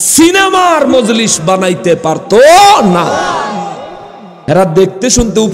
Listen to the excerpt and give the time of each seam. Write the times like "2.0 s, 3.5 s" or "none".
4.3 s

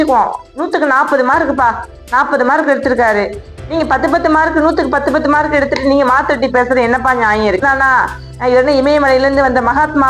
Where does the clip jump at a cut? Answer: 7.6 s

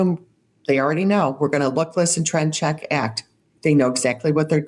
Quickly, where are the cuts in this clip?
3.4 s

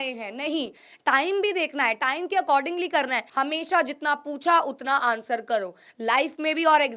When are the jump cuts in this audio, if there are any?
3.2 s

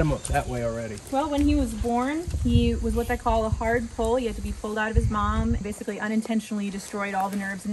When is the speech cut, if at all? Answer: 1.0 s, 2.3 s, 5.6 s

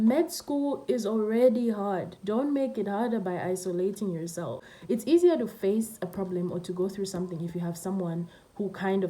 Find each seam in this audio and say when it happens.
4.7 s

